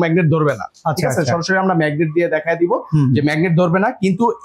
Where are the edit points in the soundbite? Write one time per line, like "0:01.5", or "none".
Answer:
none